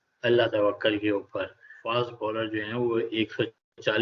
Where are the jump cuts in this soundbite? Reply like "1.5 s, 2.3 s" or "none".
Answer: 1.7 s